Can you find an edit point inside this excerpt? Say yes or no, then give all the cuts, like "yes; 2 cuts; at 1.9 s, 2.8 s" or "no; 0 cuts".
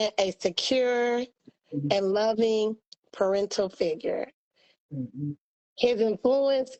no; 0 cuts